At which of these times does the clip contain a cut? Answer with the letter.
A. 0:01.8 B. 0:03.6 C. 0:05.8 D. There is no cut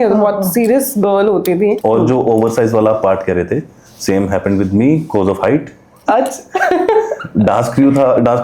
A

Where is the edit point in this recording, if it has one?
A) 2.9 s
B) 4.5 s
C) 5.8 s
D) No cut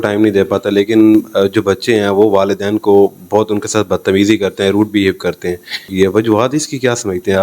C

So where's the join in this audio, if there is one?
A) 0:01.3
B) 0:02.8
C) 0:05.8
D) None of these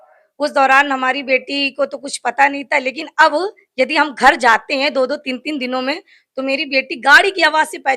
D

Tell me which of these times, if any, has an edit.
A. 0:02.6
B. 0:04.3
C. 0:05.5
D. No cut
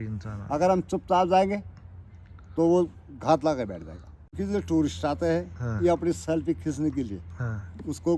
B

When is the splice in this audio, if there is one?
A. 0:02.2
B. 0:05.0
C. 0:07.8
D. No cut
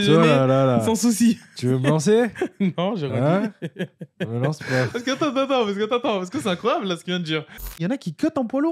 C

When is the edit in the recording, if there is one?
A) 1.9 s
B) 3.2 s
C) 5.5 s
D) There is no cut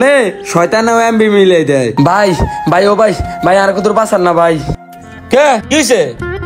A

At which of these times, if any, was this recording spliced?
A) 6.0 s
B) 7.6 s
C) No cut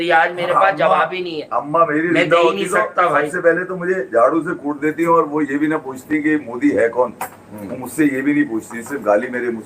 C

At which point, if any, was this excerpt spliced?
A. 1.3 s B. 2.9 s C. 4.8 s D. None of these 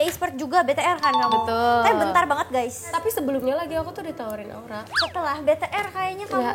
B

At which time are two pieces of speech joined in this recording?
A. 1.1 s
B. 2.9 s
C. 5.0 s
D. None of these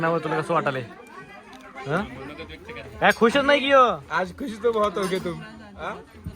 D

